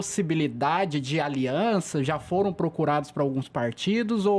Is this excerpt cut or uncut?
uncut